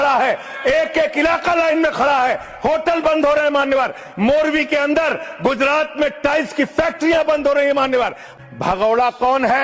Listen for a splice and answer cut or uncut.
cut